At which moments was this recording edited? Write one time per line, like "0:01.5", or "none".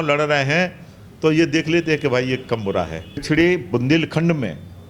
0:03.2